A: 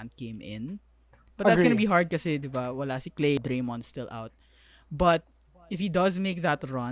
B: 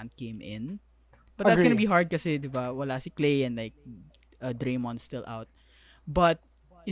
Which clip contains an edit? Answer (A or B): A